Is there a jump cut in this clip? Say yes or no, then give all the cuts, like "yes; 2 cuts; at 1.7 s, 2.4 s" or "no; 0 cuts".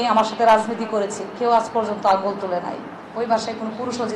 yes; 1 cut; at 3.0 s